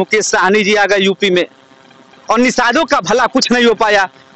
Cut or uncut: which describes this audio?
uncut